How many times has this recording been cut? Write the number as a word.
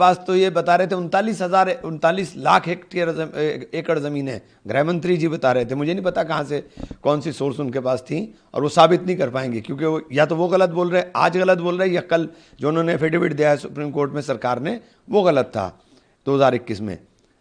zero